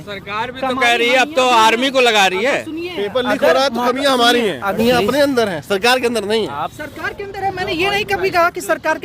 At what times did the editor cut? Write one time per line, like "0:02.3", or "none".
0:04.8